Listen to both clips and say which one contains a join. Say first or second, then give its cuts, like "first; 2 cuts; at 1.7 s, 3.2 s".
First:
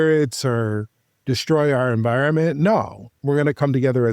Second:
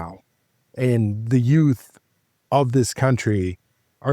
first; 1 cut; at 3.1 s